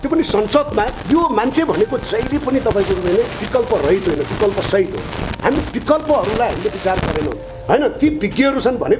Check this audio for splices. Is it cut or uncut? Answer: cut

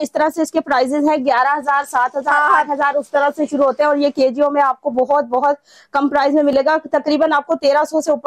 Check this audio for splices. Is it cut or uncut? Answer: uncut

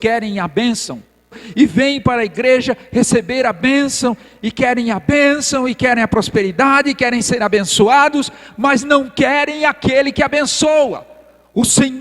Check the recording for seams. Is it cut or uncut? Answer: cut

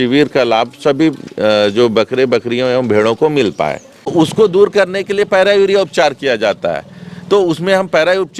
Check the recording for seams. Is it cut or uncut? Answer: cut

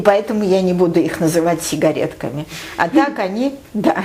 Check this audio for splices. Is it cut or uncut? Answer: uncut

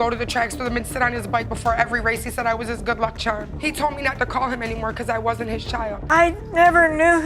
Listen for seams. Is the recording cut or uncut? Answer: cut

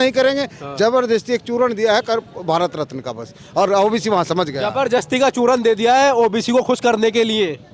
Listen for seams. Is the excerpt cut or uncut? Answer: uncut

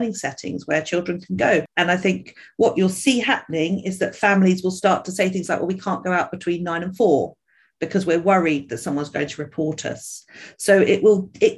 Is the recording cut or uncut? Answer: cut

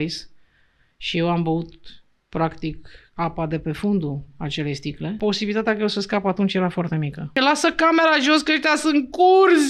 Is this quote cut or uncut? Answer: cut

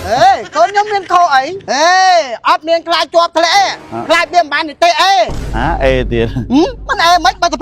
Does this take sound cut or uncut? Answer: cut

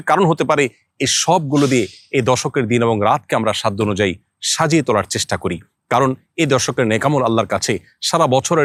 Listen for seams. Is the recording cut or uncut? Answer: uncut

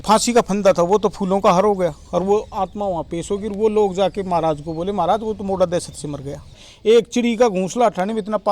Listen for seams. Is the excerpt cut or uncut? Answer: cut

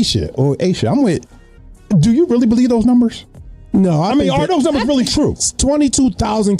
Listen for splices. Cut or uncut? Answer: uncut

